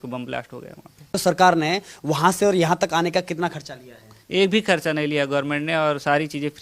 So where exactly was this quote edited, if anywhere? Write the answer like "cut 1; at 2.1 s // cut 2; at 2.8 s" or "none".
cut 1; at 1.2 s